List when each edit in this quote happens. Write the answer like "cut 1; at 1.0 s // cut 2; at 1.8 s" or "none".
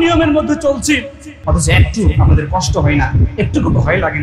cut 1; at 1.3 s